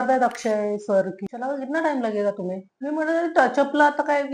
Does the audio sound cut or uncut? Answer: cut